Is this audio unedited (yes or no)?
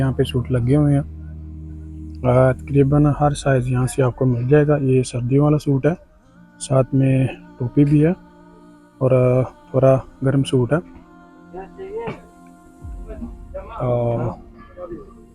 yes